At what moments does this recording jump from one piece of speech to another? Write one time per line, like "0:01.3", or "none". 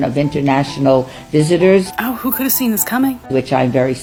none